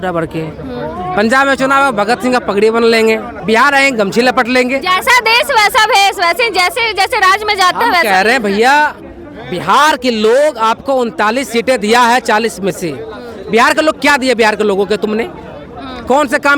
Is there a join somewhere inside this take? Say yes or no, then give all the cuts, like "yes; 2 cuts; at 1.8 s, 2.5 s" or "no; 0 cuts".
yes; 1 cut; at 3.3 s